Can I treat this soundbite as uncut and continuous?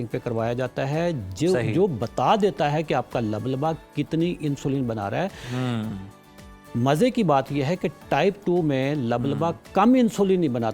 yes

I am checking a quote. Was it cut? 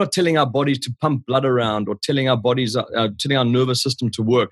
no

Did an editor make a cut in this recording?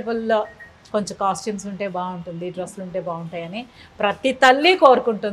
no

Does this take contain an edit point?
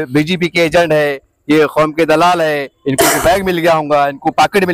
no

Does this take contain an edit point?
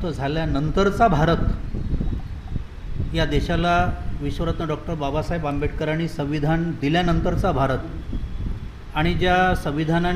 no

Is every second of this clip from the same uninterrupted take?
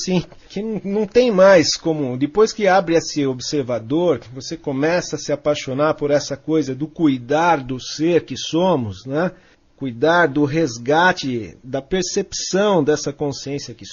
yes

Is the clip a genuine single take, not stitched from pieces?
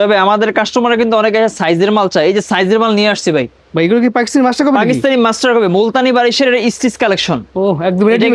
yes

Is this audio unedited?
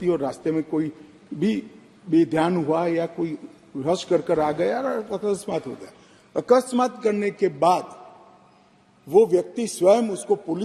yes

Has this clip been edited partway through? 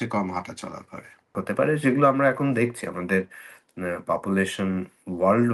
yes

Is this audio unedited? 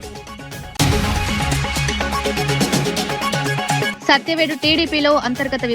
no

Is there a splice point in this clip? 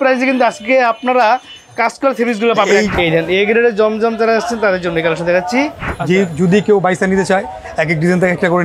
yes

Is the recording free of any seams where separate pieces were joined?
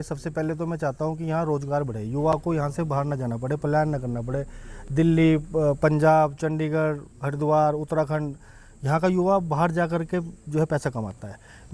yes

